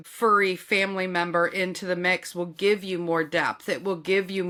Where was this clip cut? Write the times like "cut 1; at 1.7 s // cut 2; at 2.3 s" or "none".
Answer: none